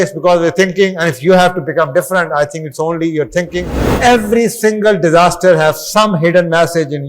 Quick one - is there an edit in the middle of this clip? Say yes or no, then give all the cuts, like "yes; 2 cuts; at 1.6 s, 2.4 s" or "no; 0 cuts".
yes; 1 cut; at 3.8 s